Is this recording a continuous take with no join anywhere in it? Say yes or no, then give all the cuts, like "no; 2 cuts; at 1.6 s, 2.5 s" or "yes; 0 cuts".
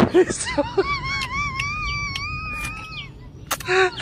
no; 1 cut; at 0.9 s